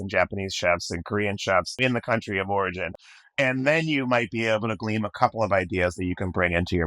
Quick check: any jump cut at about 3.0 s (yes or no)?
yes